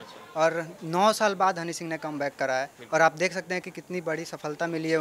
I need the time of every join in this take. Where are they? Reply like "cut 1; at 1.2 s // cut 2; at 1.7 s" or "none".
none